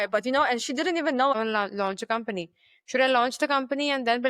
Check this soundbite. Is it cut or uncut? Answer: cut